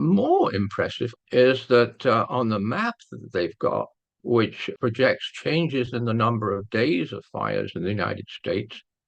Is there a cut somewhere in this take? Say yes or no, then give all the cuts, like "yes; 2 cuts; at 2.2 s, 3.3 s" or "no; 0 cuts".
yes; 2 cuts; at 1.0 s, 4.7 s